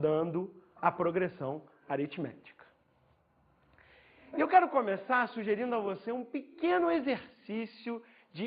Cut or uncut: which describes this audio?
cut